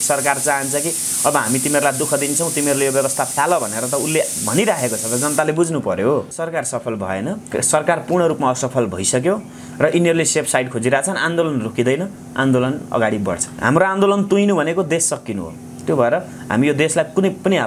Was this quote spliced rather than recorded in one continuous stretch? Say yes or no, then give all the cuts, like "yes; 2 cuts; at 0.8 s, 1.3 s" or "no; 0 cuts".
yes; 2 cuts; at 6.3 s, 13.5 s